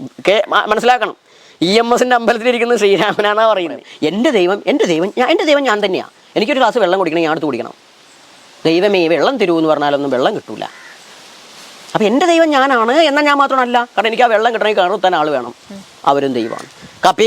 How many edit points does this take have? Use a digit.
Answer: 1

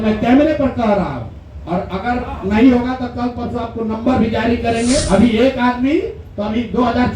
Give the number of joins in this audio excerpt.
1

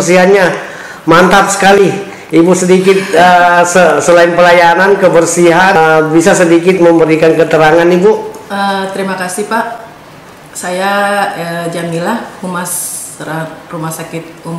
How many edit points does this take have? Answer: 1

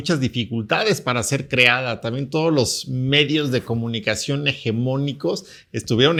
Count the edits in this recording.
0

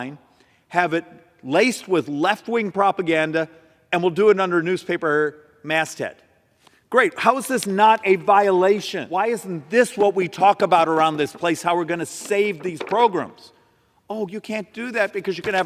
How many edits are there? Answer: 1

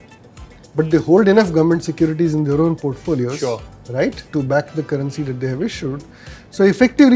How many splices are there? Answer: 1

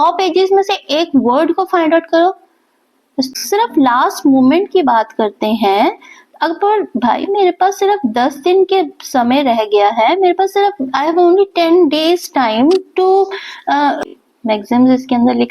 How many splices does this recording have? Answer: 2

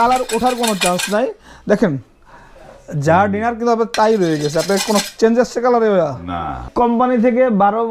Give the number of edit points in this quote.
1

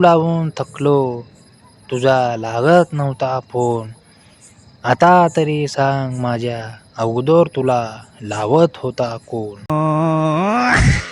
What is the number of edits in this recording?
1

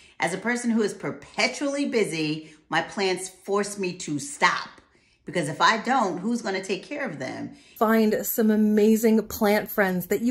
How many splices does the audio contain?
1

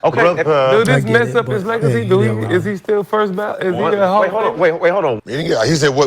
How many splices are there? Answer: 1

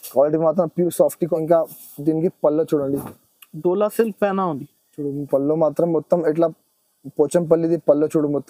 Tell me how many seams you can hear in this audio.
1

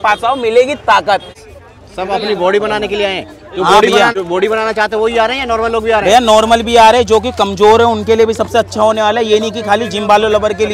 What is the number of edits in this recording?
2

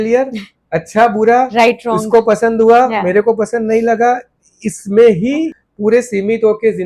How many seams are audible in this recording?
1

